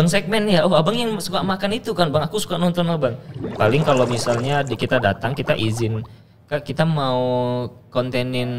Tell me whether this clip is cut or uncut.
cut